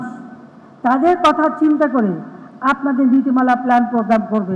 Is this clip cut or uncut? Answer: uncut